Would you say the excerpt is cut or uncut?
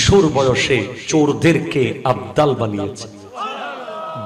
cut